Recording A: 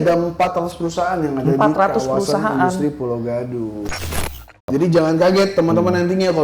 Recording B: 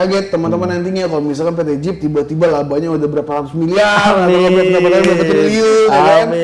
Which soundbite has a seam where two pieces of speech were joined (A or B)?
A